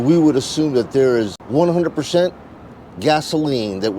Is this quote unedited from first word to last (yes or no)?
no